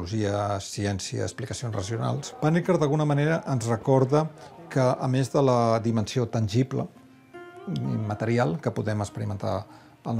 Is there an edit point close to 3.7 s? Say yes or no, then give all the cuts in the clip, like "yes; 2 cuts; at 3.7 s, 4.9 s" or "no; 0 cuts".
no; 1 cut; at 2.3 s